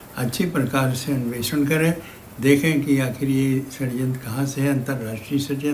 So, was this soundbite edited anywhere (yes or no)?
no